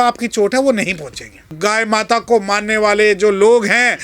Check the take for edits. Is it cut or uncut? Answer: cut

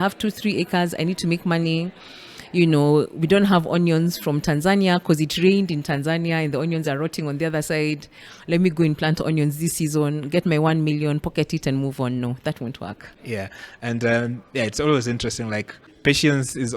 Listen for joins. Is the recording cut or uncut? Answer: uncut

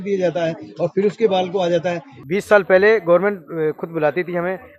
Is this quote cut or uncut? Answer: cut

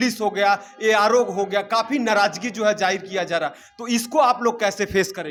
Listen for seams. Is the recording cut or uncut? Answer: uncut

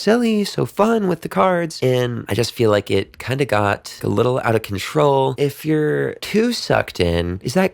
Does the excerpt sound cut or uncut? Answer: cut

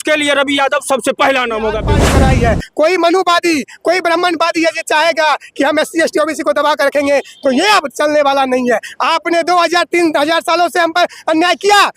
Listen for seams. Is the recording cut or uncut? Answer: cut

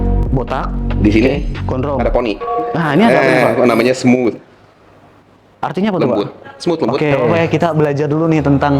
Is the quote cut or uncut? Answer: cut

